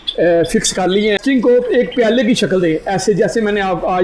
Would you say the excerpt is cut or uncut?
cut